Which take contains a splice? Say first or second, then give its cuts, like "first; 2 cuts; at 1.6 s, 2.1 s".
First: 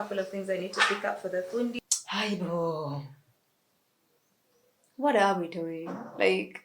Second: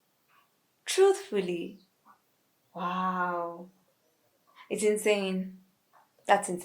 first; 1 cut; at 1.8 s